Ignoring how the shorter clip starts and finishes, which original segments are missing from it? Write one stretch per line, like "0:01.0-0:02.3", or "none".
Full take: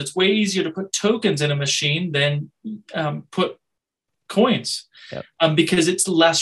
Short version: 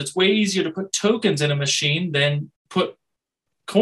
0:02.6-0:03.2